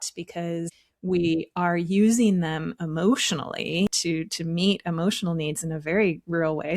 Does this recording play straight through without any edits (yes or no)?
no